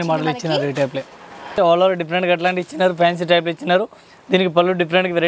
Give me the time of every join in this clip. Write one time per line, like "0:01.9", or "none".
0:01.6